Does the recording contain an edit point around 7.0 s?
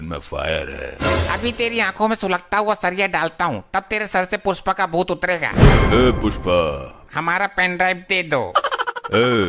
yes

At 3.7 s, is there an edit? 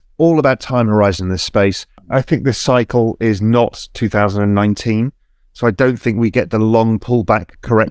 no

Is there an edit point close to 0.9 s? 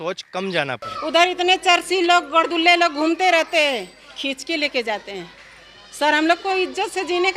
yes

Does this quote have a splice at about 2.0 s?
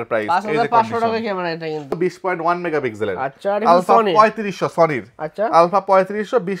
yes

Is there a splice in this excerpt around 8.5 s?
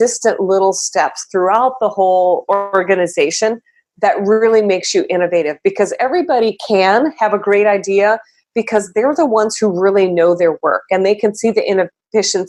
no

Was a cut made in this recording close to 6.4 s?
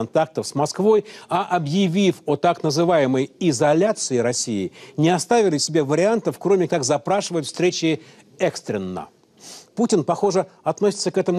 no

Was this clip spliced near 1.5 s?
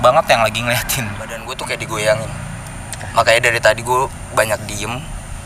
yes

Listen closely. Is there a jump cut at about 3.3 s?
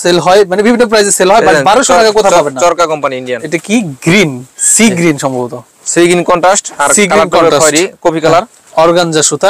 yes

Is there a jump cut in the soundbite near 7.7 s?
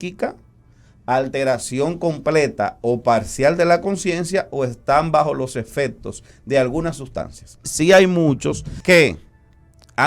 yes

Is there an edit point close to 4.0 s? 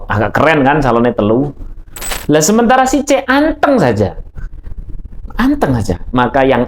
no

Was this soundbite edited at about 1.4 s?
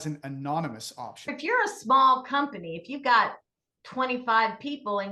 yes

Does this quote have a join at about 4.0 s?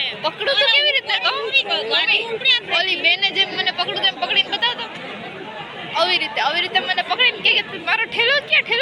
no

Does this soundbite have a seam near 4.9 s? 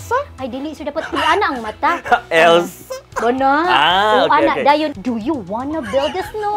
yes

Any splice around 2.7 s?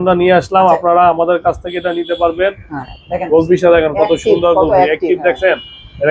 yes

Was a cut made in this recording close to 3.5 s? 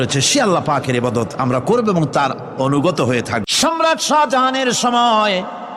yes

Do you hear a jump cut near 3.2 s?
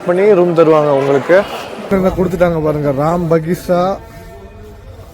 no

